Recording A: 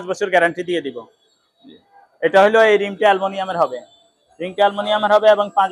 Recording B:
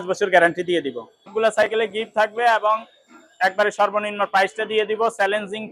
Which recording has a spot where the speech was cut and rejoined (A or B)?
B